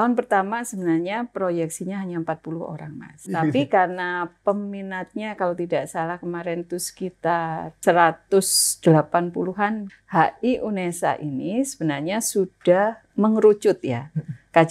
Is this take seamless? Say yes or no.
no